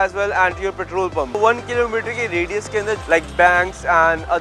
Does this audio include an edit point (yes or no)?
yes